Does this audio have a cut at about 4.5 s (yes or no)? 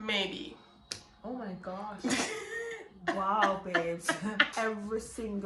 yes